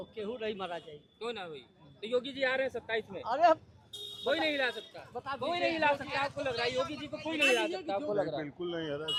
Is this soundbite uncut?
yes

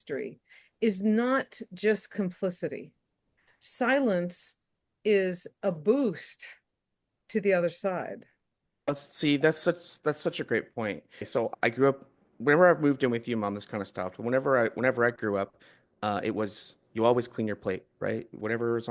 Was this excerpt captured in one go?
no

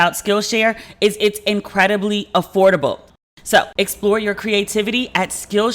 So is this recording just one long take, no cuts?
no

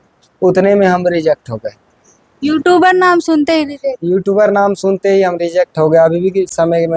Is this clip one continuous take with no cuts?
yes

